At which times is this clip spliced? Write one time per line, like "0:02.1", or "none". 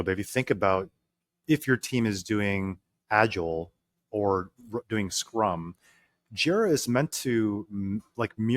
0:01.4